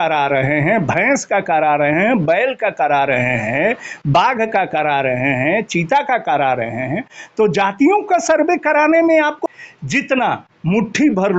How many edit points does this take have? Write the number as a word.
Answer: one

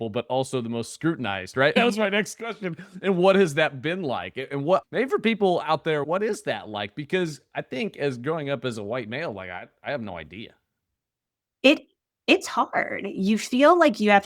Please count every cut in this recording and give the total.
three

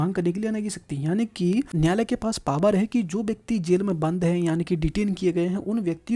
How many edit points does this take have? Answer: one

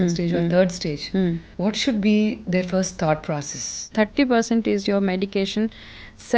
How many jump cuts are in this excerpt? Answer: two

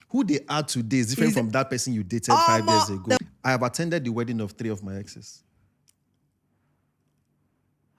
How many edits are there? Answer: one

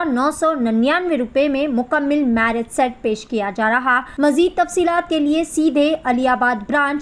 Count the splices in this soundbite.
one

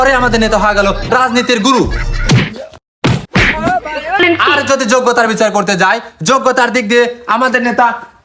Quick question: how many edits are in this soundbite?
one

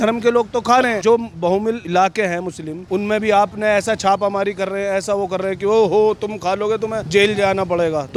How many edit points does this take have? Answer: zero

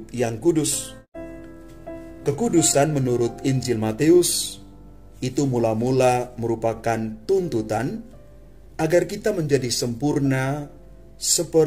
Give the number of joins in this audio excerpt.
one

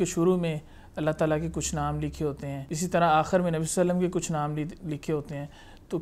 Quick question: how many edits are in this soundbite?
one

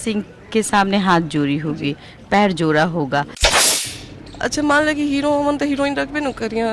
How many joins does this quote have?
one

